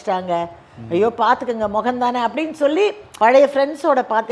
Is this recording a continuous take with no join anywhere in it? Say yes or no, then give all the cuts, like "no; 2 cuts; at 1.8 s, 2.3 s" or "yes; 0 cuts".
no; 1 cut; at 3.0 s